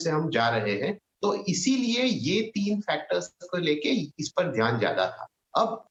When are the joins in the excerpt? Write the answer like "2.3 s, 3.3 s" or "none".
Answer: none